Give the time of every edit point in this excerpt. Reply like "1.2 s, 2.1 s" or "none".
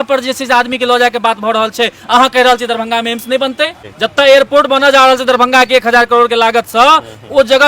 3.8 s